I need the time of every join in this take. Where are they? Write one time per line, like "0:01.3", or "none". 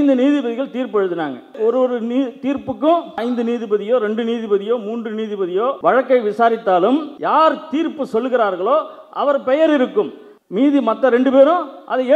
0:05.8
0:07.1